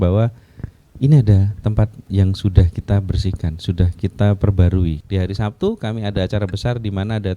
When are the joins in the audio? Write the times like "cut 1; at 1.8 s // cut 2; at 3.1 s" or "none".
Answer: cut 1; at 5.0 s